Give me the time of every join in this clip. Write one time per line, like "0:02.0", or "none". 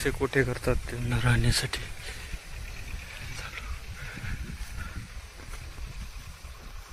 none